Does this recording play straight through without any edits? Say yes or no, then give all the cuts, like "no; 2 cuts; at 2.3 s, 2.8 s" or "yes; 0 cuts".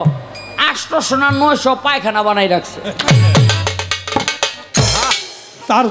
no; 1 cut; at 4.8 s